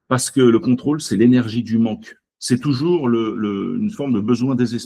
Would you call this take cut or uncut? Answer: uncut